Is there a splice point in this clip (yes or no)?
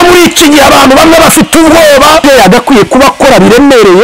yes